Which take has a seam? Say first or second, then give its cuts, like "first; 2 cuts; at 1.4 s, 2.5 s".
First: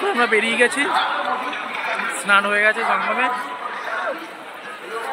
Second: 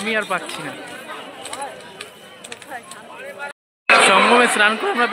second; 1 cut; at 3.6 s